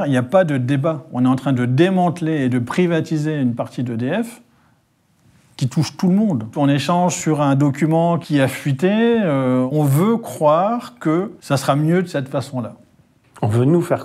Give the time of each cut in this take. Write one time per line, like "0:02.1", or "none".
0:06.5
0:08.2
0:09.7
0:11.4